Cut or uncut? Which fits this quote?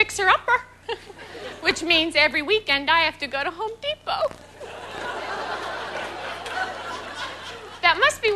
cut